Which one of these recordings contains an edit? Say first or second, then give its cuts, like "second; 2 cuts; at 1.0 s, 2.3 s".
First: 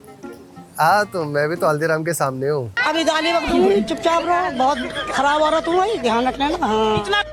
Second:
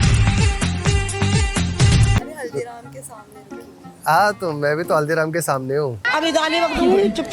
second; 1 cut; at 2.2 s